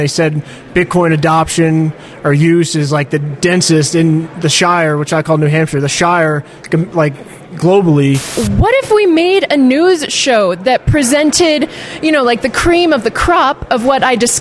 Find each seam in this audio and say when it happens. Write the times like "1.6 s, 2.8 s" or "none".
8.3 s